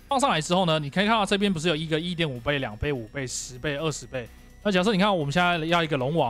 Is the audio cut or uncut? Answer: cut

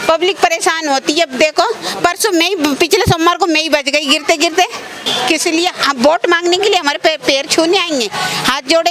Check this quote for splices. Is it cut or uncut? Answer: cut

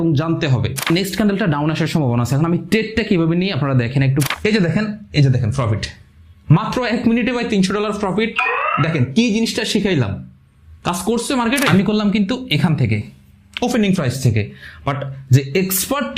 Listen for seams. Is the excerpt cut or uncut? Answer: cut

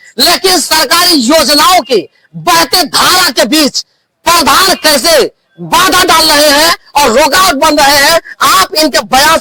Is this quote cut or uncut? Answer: uncut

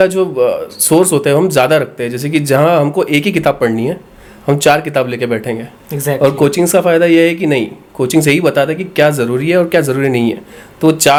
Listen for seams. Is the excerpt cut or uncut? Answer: uncut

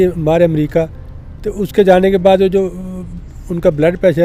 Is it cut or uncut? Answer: uncut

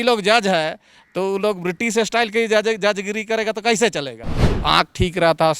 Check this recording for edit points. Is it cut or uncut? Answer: cut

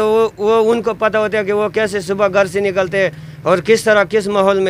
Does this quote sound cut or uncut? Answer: uncut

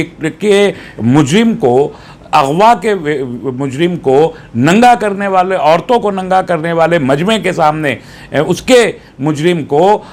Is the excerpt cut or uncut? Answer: uncut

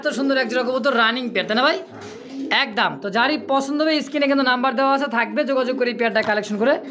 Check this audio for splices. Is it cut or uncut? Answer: uncut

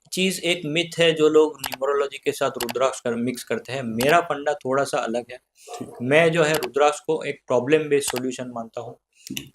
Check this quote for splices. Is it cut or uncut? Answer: cut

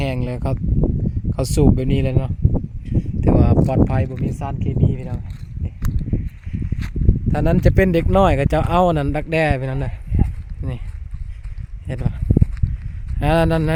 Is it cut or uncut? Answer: uncut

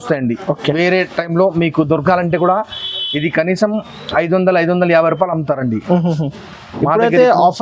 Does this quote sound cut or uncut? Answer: uncut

